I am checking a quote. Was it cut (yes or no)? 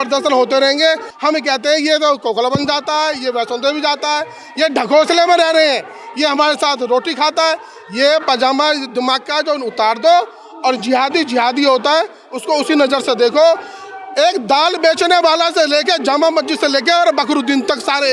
yes